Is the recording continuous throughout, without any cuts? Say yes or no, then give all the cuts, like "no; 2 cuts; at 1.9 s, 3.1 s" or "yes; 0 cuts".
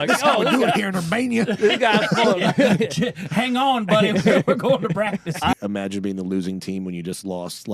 no; 1 cut; at 5.5 s